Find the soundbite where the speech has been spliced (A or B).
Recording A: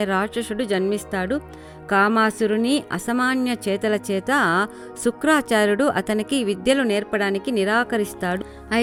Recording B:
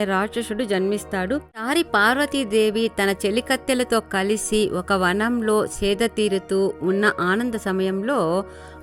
B